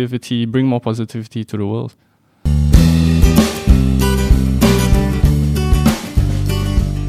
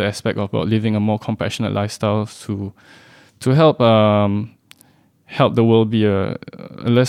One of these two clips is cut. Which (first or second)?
first